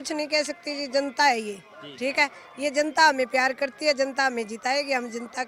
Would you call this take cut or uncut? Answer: uncut